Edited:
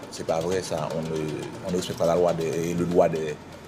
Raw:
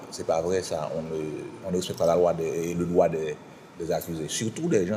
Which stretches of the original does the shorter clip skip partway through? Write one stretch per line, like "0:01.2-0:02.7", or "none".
none